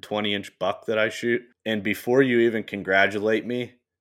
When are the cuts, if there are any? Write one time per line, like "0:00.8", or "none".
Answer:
0:01.5